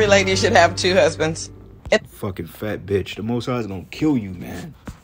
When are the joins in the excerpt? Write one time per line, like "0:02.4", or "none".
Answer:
none